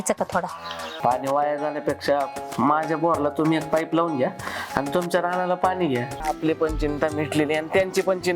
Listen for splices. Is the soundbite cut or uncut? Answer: cut